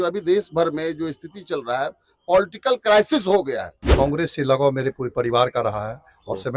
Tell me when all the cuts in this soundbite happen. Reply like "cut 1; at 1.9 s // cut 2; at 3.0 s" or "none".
cut 1; at 3.8 s